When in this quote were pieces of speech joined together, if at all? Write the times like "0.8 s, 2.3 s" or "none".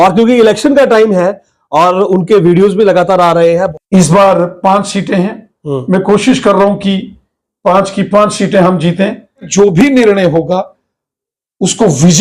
3.7 s, 9.5 s